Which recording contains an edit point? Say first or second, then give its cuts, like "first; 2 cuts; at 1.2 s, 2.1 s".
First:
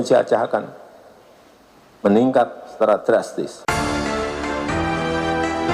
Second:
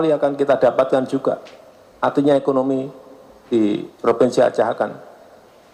first; 1 cut; at 3.6 s